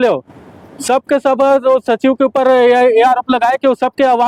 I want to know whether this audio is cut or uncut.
uncut